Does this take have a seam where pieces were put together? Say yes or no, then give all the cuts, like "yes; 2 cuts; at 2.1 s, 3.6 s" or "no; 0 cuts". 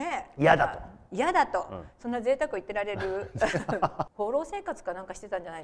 yes; 1 cut; at 4.1 s